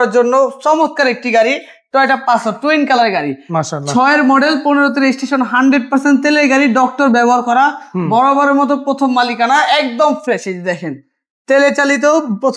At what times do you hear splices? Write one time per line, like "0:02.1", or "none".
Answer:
none